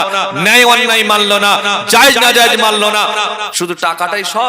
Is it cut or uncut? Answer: cut